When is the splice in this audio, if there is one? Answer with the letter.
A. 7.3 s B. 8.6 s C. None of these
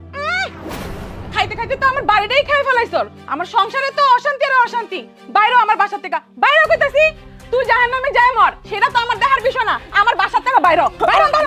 A